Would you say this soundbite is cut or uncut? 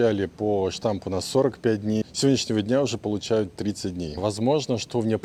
uncut